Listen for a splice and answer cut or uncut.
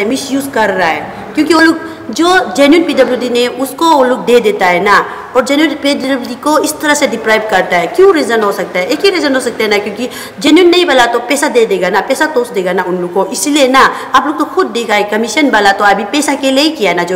uncut